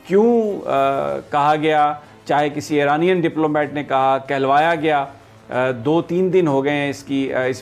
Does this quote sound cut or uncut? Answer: uncut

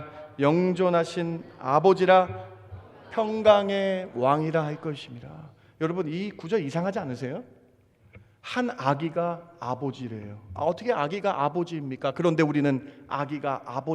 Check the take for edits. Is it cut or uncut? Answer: uncut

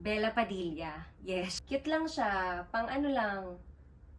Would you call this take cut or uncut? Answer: cut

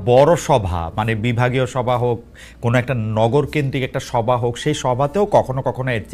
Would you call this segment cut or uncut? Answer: uncut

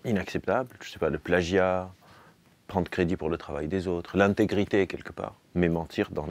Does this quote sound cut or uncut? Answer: cut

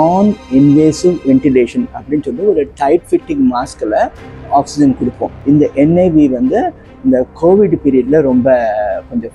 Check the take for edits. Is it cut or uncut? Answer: cut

